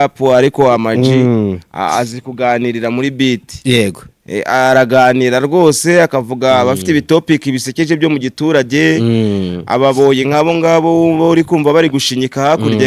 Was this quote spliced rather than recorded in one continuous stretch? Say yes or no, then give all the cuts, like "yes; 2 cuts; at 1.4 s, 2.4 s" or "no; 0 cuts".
no; 0 cuts